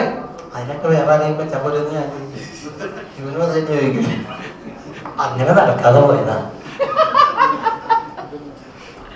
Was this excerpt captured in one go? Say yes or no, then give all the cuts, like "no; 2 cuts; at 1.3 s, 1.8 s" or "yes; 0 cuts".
yes; 0 cuts